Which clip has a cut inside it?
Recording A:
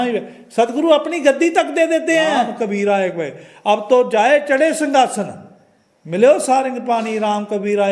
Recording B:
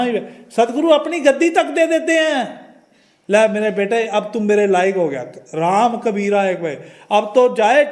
A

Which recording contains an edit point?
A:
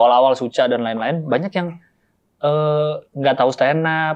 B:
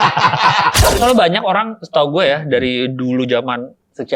B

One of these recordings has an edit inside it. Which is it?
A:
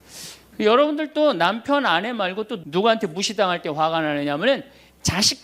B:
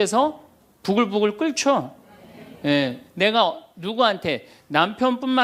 A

